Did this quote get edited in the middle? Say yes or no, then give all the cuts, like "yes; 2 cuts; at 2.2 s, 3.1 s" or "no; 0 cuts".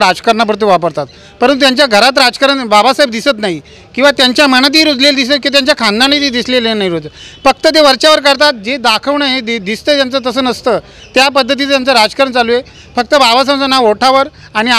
no; 0 cuts